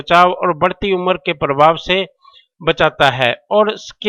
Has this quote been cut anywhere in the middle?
no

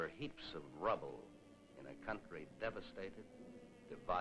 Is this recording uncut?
no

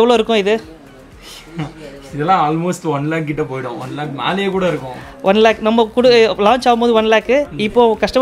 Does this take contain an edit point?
no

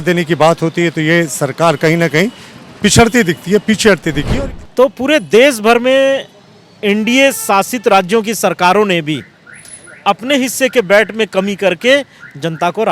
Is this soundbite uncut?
no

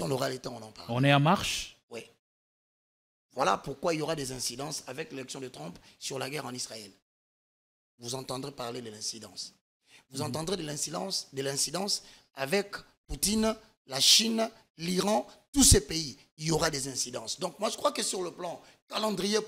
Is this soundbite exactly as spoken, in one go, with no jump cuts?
yes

